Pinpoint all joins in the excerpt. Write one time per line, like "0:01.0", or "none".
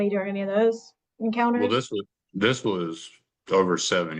none